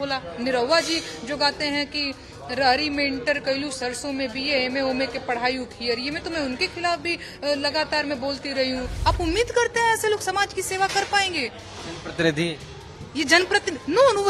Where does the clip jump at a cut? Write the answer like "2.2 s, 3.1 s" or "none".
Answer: 8.9 s